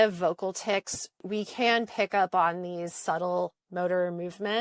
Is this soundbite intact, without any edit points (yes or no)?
no